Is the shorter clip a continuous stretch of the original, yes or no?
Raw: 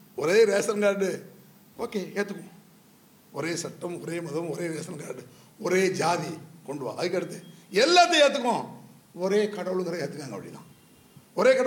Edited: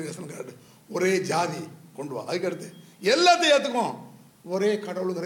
yes